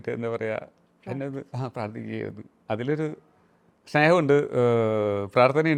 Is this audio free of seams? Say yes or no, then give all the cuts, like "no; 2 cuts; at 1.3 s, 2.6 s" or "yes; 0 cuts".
yes; 0 cuts